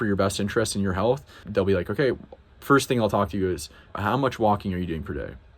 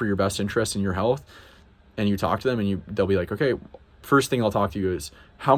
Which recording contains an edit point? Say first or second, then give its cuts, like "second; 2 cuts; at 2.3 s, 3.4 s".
first; 2 cuts; at 1.4 s, 3.9 s